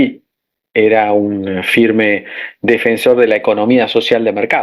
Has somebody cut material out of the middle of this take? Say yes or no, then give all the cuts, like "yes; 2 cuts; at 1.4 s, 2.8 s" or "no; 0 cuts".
no; 0 cuts